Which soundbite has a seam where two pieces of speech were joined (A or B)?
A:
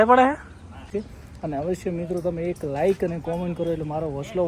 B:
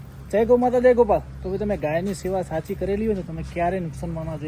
A